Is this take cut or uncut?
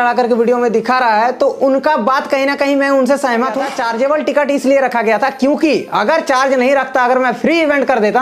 cut